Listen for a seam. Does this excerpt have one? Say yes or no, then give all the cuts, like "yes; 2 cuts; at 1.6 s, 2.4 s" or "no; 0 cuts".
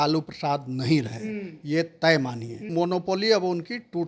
yes; 1 cut; at 2.7 s